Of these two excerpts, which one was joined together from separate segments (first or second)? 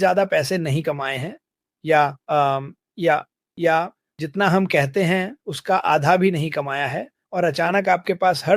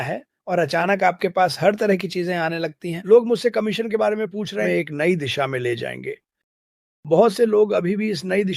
second